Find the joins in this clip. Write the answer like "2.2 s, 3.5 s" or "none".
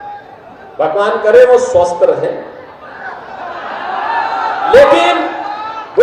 none